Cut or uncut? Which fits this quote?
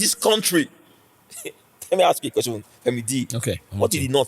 cut